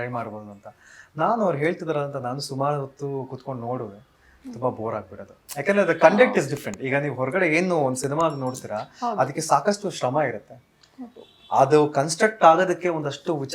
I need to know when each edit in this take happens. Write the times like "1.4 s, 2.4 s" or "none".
none

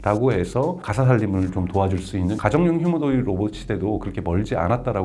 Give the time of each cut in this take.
0.8 s, 2.4 s

